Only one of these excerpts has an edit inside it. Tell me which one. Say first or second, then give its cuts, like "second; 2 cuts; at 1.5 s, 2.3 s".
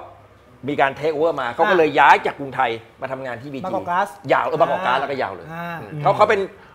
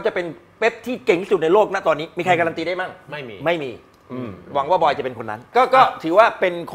second; 1 cut; at 5.5 s